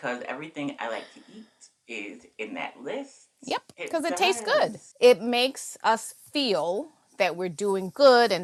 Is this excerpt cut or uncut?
uncut